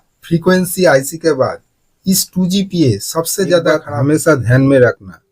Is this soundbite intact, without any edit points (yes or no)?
no